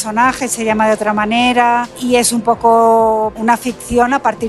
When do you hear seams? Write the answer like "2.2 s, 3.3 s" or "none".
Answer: 1.9 s, 3.3 s